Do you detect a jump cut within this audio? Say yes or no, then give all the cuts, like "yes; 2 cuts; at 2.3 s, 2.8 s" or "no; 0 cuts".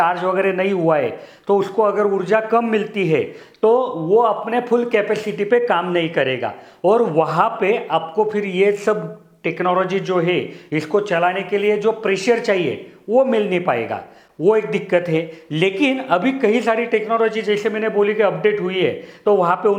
no; 0 cuts